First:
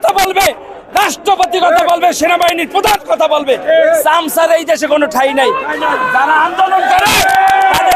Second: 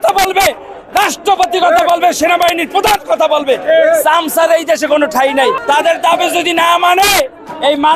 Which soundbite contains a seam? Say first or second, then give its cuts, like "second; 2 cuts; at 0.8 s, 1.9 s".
second; 1 cut; at 5.6 s